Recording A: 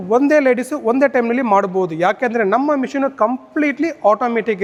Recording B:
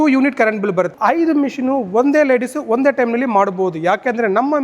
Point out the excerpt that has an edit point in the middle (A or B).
B